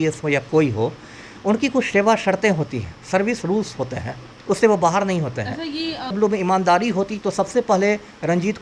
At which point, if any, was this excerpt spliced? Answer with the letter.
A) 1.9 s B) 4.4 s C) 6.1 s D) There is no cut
C